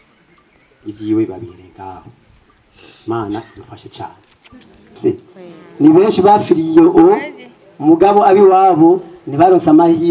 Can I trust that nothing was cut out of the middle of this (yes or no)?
no